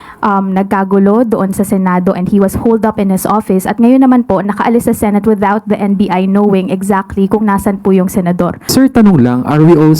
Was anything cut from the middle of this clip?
yes; 1 cut; at 8.7 s

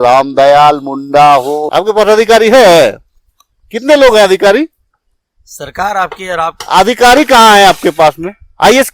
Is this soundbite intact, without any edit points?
no; 1 cut; at 1.6 s

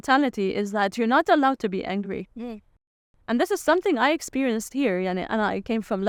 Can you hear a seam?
no; 0 cuts

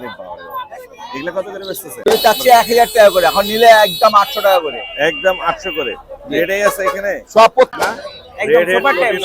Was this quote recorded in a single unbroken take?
no; 2 cuts; at 2.1 s, 7.7 s

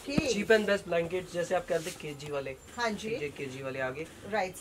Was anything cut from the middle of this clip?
no; 0 cuts

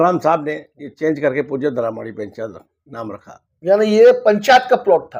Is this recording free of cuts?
yes; 0 cuts

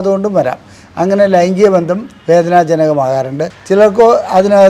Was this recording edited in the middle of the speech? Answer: yes; 1 cut; at 3.5 s

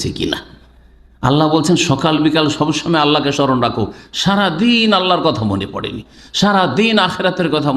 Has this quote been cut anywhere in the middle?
no; 0 cuts

